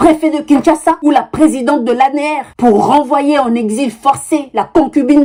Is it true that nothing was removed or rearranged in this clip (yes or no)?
yes